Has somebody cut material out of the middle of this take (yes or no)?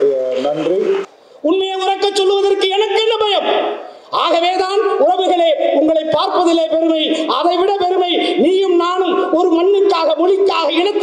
yes